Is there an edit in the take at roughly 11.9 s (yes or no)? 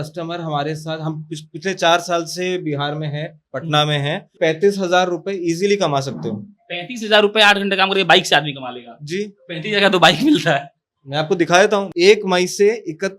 yes